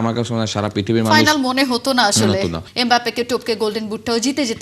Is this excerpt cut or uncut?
cut